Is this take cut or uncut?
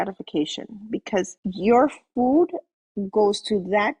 cut